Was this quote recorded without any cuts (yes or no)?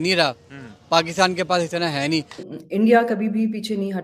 no